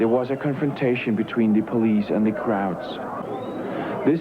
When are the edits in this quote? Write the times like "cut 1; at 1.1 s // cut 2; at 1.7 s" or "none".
cut 1; at 3.2 s